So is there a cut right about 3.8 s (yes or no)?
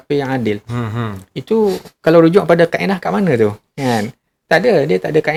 no